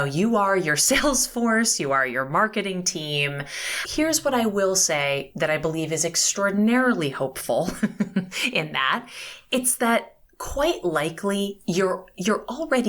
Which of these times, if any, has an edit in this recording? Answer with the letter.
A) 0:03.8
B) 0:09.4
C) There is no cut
A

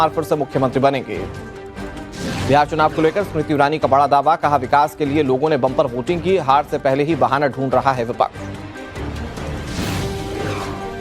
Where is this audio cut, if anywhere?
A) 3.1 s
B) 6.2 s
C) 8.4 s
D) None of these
B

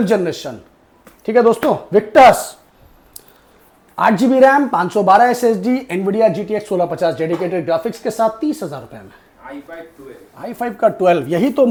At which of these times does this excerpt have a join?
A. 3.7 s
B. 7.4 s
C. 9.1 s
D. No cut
D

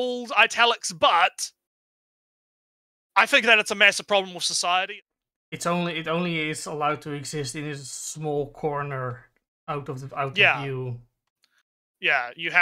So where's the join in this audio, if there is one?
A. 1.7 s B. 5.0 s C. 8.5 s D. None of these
B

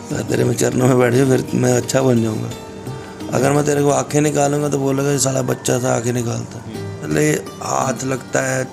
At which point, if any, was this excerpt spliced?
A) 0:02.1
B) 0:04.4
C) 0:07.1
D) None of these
C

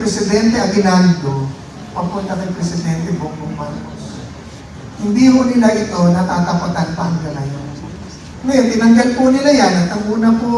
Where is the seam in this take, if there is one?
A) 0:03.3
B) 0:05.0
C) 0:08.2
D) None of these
C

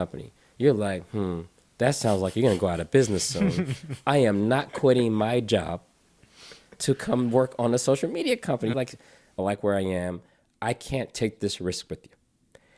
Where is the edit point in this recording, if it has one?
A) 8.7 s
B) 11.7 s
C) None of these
A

